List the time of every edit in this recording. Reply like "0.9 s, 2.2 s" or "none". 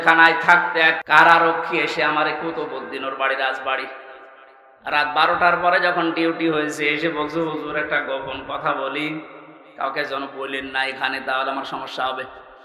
1.0 s